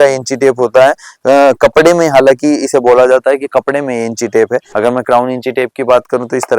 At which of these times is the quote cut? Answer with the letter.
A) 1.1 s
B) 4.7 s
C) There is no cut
B